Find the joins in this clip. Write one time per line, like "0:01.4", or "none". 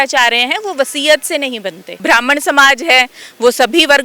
0:01.8